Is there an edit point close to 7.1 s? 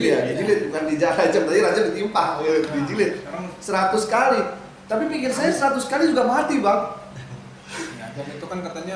no; 0 cuts

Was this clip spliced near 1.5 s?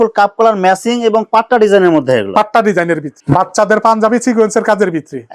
no; 1 cut; at 3.1 s

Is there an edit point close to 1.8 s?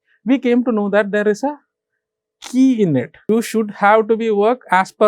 no; 1 cut; at 3.3 s

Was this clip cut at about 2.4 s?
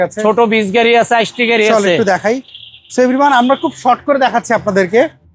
no; 0 cuts

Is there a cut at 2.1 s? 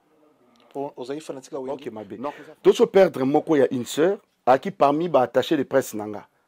yes; 1 cut; at 2.1 s

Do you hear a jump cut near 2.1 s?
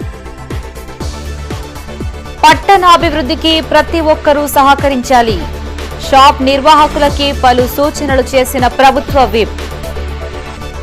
yes; 1 cut; at 2.1 s

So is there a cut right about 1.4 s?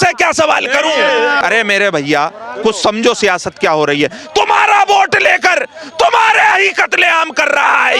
yes; 1 cut; at 1.4 s

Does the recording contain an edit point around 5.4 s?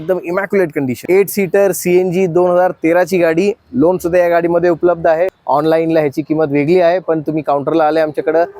yes; 2 cuts; at 1.0 s, 5.4 s

